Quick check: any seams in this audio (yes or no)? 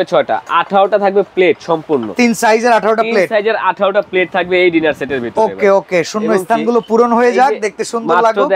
no